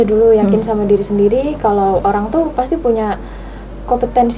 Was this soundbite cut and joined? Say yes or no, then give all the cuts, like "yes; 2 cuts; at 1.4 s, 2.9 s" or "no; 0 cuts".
no; 0 cuts